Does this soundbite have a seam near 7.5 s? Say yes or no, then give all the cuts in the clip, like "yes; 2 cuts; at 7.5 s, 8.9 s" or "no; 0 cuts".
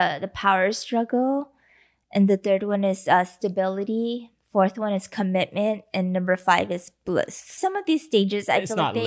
yes; 1 cut; at 7.5 s